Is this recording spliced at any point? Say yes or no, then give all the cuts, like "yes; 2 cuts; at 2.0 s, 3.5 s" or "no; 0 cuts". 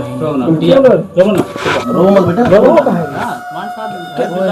no; 0 cuts